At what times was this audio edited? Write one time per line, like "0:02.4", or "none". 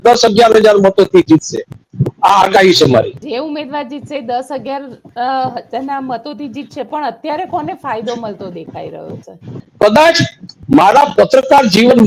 0:03.2
0:09.6